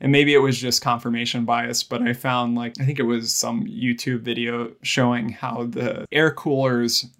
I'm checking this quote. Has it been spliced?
yes; 3 cuts; at 2.7 s, 4.8 s, 6.1 s

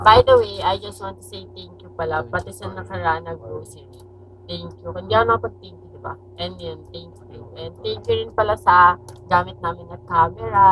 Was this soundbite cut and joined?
no; 0 cuts

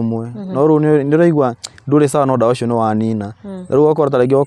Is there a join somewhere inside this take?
no; 0 cuts

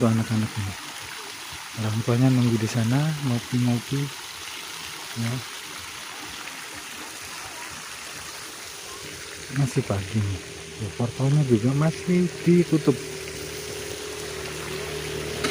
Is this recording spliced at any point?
no; 0 cuts

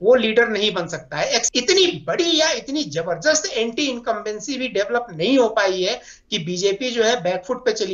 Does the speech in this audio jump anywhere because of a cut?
yes; 1 cut; at 1.4 s

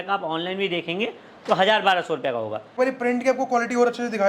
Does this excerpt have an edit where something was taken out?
yes; 1 cut; at 2.7 s

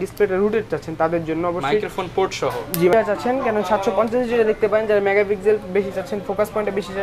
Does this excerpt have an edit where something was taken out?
yes; 1 cut; at 2.9 s

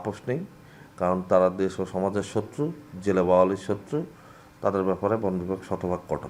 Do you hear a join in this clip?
no; 0 cuts

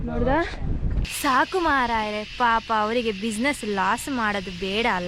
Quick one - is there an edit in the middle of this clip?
yes; 1 cut; at 1.0 s

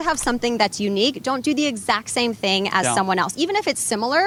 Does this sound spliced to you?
no; 0 cuts

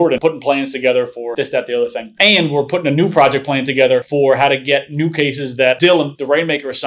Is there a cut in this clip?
no; 0 cuts

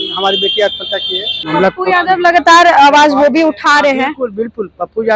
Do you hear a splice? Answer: yes; 1 cut; at 1.3 s

